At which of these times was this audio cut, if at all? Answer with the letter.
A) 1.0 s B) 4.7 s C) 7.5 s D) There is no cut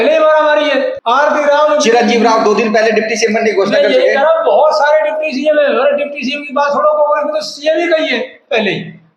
A